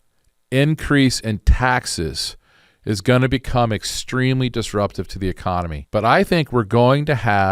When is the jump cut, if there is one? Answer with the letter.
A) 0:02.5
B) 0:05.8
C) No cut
B